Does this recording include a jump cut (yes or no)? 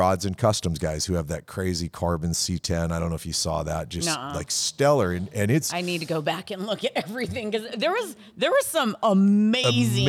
no